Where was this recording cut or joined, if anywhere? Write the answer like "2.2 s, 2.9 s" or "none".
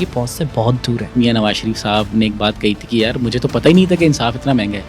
1.2 s